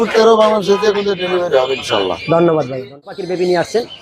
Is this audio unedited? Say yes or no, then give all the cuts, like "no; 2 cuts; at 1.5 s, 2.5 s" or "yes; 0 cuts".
no; 1 cut; at 3.1 s